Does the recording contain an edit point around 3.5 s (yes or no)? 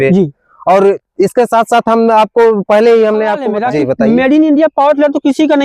yes